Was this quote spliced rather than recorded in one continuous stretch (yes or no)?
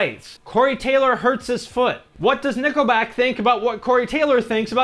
yes